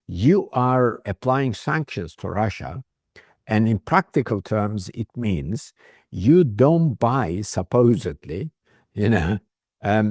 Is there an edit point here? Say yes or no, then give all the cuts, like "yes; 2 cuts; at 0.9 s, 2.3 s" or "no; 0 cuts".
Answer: yes; 1 cut; at 1.0 s